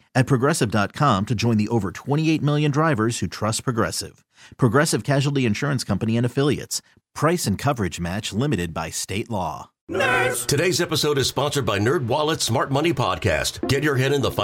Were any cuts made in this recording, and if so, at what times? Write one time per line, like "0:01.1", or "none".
0:09.7

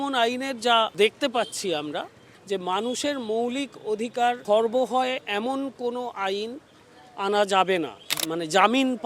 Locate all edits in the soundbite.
0:00.9
0:02.2
0:04.4
0:08.1

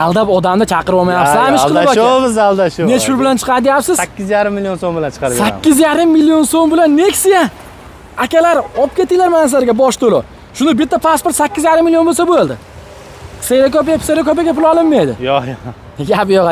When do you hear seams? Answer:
none

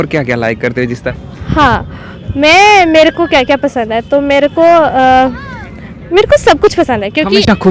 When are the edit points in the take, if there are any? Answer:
0:01.1

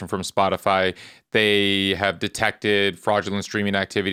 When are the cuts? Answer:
none

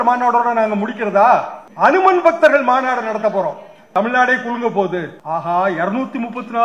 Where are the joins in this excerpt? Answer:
0:01.6
0:03.7
0:05.2

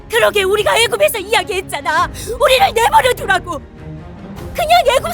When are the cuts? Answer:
0:02.2

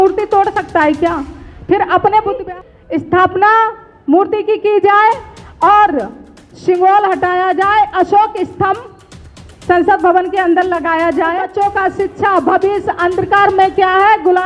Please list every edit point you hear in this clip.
0:02.4
0:11.5

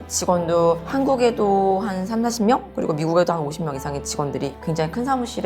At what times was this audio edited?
none

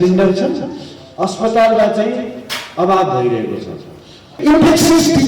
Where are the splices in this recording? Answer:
0:04.3

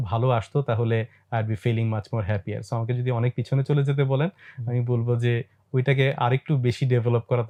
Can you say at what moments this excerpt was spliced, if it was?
none

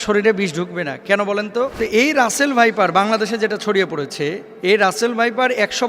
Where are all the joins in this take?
0:01.7
0:04.5

